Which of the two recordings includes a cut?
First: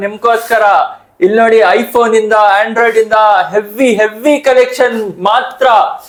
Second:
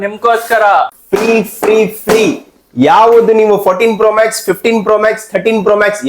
second; 1 cut; at 1.0 s

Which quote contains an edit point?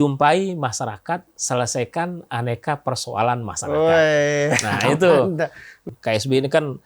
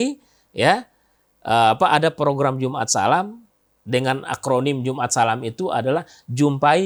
first; 1 cut; at 5.7 s

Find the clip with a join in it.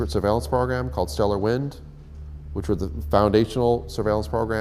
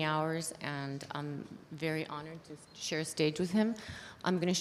second; 1 cut; at 2.6 s

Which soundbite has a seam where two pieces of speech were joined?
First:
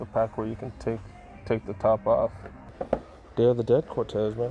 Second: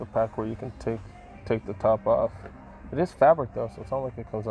first; 1 cut; at 2.8 s

